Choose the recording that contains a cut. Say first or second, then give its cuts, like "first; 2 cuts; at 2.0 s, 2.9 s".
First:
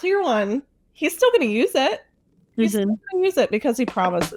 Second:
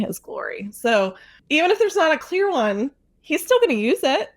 second; 1 cut; at 1.3 s